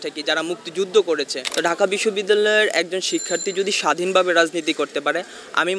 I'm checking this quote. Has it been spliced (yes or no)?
yes